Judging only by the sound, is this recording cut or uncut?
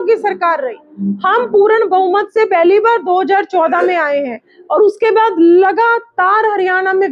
uncut